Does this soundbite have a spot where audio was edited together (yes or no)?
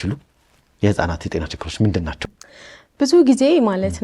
yes